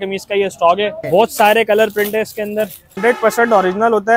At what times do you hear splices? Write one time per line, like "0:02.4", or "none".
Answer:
0:01.0
0:02.8